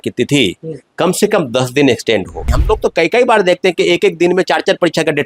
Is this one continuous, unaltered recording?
no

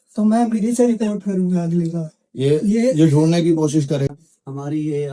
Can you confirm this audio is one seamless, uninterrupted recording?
no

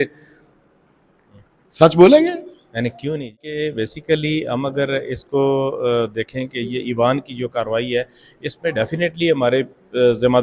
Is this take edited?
no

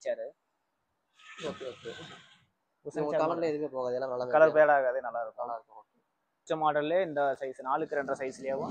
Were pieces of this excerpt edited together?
yes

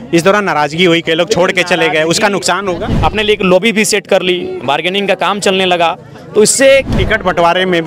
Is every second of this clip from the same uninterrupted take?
no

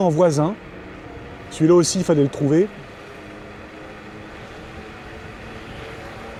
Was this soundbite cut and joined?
no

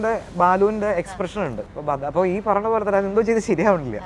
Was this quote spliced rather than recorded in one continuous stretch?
no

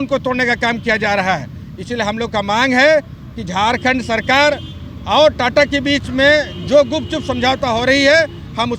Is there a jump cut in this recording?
no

